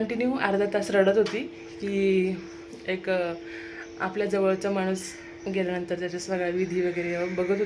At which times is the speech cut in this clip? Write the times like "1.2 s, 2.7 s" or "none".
none

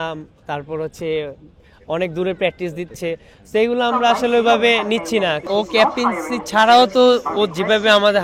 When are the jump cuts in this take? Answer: 5.4 s

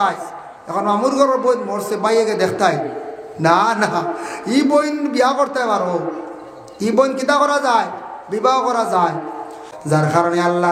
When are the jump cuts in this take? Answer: 9.6 s

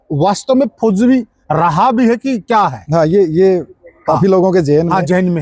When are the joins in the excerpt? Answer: none

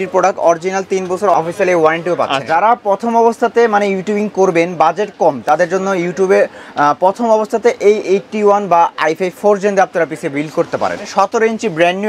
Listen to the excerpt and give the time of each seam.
1.3 s, 2.4 s, 11.1 s

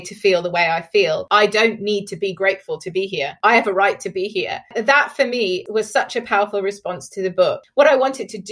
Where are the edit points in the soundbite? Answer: 1.2 s, 3.3 s, 4.7 s, 5.6 s, 7.6 s

